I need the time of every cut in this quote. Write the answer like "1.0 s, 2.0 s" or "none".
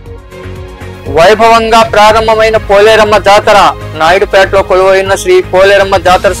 1.0 s